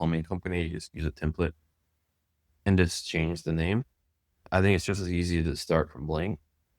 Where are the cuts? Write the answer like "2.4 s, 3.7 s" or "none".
4.4 s